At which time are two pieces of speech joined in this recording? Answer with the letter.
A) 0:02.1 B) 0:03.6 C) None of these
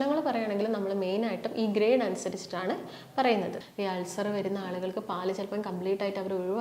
B